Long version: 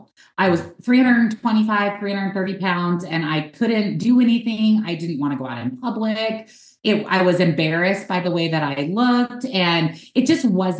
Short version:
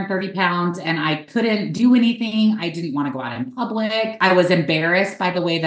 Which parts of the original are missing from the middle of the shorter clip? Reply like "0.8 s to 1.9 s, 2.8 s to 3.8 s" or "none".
6.4 s to 7.1 s